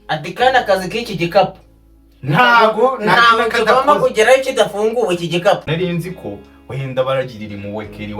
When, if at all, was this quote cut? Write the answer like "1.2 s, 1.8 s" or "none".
5.7 s